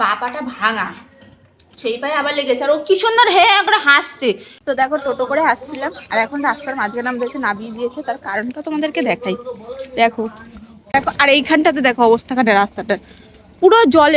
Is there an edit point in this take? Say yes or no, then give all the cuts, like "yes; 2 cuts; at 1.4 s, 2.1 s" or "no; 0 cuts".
yes; 2 cuts; at 4.5 s, 10.9 s